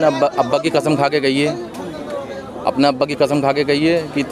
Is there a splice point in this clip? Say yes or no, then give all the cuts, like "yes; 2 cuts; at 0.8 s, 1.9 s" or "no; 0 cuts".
no; 0 cuts